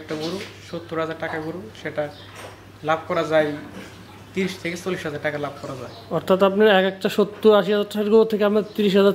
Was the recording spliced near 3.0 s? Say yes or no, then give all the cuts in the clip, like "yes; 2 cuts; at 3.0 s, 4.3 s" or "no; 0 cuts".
no; 0 cuts